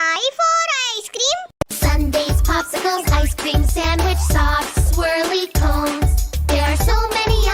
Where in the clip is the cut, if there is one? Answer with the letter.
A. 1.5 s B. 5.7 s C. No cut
A